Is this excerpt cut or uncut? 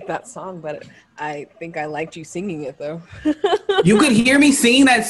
cut